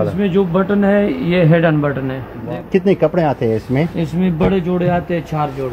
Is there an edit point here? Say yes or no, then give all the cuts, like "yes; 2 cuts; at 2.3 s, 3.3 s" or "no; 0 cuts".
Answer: yes; 1 cut; at 2.4 s